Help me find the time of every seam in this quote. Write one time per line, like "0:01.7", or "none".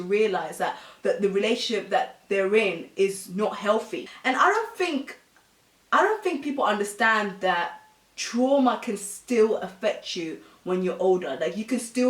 0:04.1